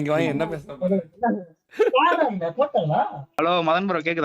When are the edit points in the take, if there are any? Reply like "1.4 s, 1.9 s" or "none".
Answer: 3.2 s